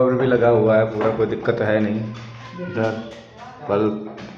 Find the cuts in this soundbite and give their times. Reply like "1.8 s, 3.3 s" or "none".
none